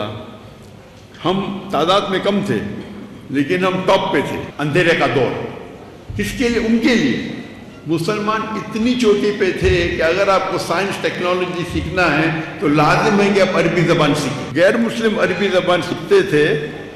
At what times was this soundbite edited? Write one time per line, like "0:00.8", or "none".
0:04.5
0:14.5